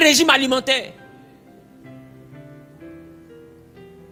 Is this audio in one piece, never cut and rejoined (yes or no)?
yes